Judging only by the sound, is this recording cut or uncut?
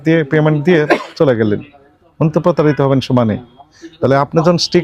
uncut